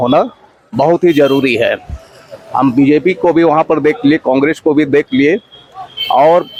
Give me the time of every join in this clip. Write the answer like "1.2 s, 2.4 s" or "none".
none